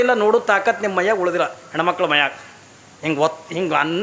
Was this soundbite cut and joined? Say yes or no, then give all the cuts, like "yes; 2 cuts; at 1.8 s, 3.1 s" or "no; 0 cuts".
no; 0 cuts